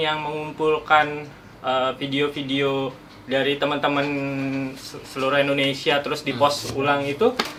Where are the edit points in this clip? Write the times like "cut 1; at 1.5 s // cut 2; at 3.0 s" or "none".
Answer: none